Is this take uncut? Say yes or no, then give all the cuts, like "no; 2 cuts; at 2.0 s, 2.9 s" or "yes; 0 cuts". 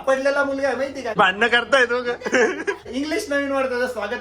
no; 2 cuts; at 1.2 s, 2.8 s